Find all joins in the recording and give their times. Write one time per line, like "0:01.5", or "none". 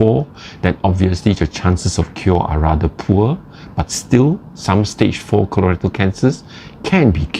none